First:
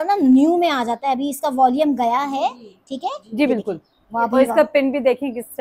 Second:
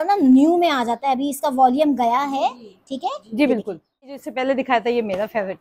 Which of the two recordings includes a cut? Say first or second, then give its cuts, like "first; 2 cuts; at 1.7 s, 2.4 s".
second; 1 cut; at 4.1 s